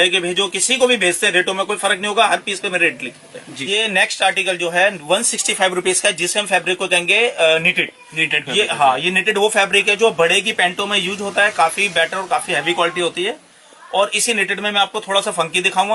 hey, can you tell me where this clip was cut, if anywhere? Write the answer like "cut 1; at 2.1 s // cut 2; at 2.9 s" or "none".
none